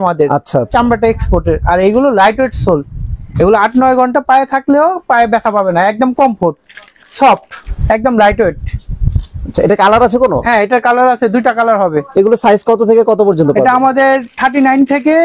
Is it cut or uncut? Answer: uncut